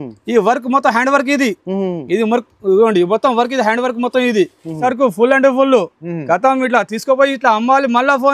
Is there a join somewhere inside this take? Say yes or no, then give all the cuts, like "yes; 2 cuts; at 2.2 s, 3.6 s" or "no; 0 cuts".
yes; 1 cut; at 4.8 s